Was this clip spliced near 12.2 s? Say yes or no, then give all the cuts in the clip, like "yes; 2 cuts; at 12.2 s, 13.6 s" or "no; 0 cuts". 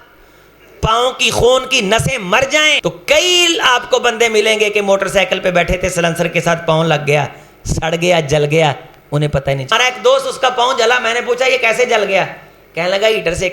no; 2 cuts; at 2.8 s, 9.7 s